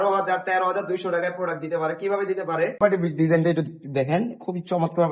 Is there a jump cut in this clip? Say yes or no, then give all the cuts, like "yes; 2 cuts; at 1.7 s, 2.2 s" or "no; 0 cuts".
yes; 1 cut; at 2.8 s